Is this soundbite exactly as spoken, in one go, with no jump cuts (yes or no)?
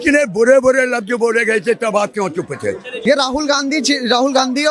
no